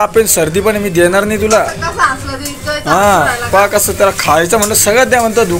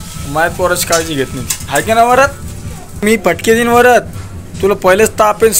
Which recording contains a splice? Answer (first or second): second